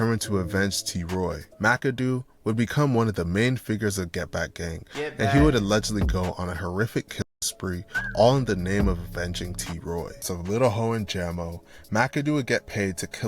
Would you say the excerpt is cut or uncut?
cut